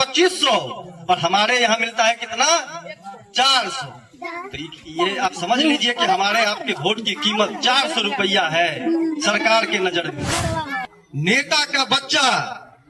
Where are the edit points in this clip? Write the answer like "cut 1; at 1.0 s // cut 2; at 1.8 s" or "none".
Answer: cut 1; at 10.8 s